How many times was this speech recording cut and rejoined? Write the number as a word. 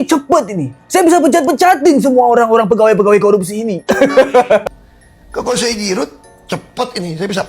one